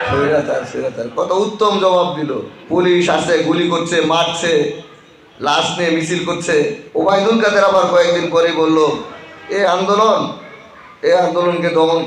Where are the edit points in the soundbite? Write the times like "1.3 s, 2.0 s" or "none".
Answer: 2.5 s, 6.8 s